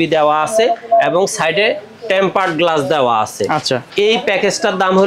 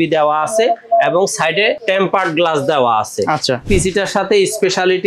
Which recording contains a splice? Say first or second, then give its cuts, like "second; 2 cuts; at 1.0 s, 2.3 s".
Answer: second; 2 cuts; at 1.8 s, 3.7 s